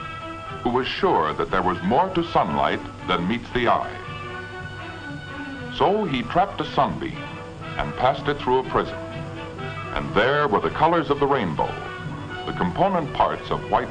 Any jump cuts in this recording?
yes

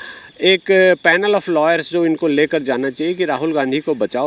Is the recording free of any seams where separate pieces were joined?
yes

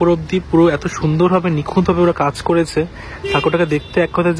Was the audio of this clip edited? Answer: no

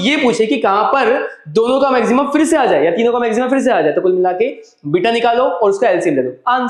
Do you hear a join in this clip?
no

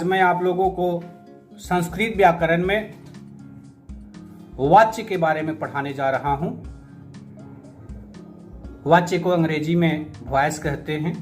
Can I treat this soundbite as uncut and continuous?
no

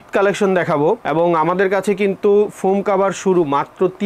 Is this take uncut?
yes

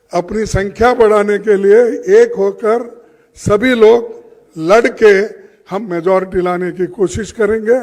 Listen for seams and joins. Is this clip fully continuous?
yes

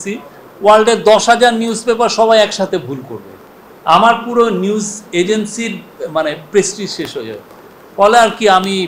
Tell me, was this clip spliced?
no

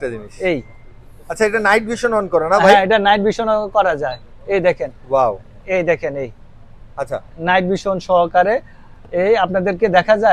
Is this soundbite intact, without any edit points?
yes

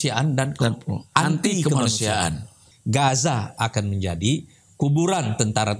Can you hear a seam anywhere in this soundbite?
yes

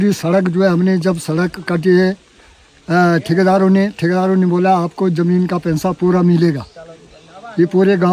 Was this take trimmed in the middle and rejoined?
no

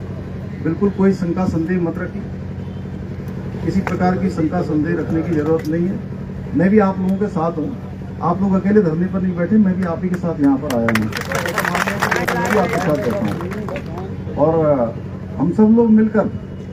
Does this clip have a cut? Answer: no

